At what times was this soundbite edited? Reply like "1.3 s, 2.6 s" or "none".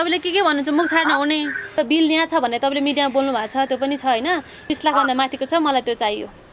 1.8 s, 4.7 s